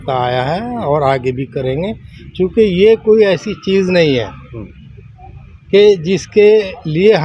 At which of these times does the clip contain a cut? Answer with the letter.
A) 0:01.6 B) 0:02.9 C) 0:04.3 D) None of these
D